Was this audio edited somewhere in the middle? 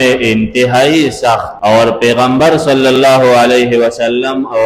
yes; 1 cut; at 1.5 s

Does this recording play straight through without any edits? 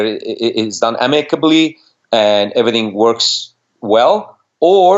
yes; 0 cuts

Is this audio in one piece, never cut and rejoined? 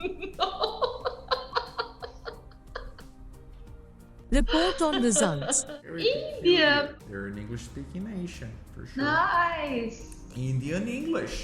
no; 1 cut; at 6.9 s

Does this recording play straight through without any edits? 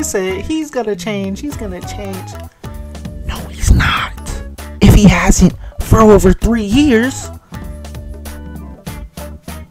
no; 1 cut; at 7.2 s

